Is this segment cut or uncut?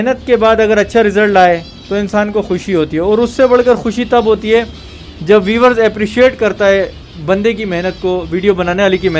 uncut